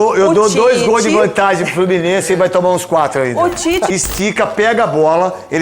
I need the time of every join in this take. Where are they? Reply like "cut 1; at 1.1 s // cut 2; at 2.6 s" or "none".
cut 1; at 3.9 s